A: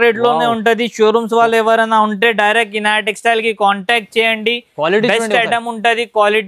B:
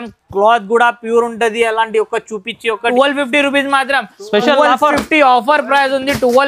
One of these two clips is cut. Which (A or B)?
B